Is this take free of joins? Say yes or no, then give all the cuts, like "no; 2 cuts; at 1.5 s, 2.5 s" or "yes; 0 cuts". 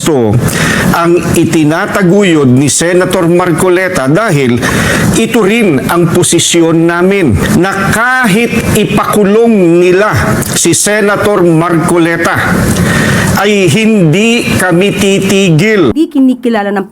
no; 2 cuts; at 7.4 s, 15.9 s